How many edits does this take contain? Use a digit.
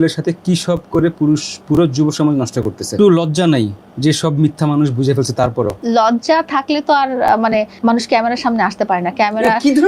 3